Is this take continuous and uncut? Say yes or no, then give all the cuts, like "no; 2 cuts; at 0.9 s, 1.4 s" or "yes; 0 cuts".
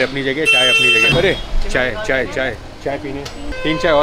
no; 1 cut; at 1.1 s